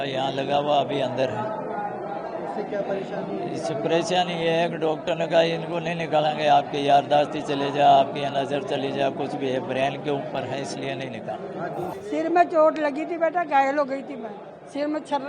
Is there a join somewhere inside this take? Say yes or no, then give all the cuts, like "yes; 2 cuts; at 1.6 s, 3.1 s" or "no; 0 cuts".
yes; 1 cut; at 11.9 s